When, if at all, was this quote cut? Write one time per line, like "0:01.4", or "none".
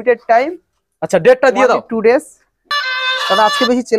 0:02.6

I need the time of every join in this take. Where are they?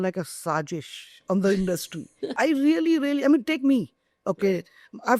0:02.3

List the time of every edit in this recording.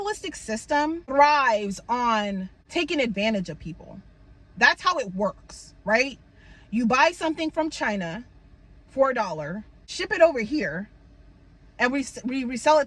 0:01.0
0:02.6
0:09.9

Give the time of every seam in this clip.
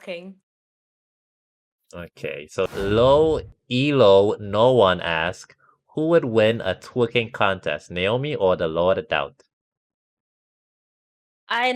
0:02.7

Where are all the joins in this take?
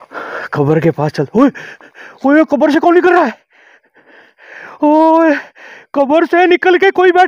none

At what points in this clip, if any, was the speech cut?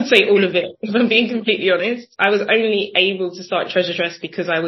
0:02.1

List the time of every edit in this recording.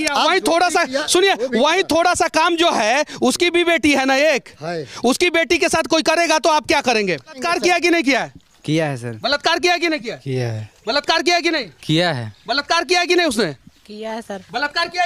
0:07.4

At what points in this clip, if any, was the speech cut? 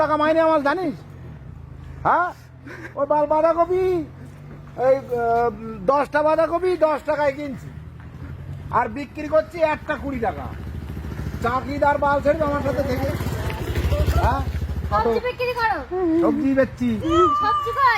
0:15.0

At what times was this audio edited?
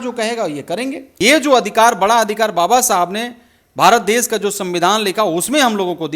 0:01.1

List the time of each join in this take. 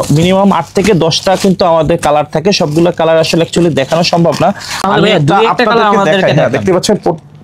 none

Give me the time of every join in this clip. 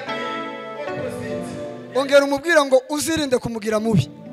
0:01.8

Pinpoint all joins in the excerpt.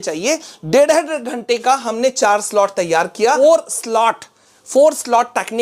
0:03.4

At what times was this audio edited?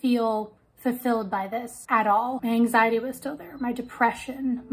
none

